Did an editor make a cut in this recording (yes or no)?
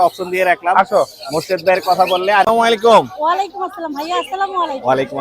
yes